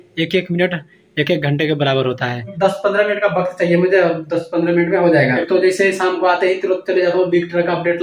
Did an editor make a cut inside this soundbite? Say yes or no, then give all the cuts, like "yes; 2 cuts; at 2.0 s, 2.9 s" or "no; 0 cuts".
yes; 2 cuts; at 2.4 s, 5.4 s